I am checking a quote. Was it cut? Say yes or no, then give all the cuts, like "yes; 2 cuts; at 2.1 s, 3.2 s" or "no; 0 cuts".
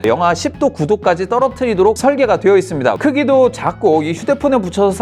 no; 0 cuts